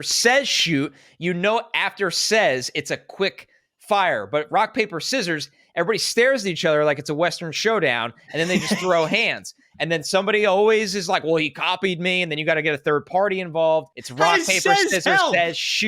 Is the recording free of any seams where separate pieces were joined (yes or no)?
no